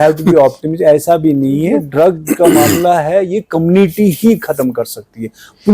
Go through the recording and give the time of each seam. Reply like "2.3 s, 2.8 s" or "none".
1.8 s